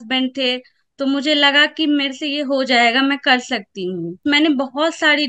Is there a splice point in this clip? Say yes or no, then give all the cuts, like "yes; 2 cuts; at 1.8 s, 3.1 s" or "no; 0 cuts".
yes; 1 cut; at 4.2 s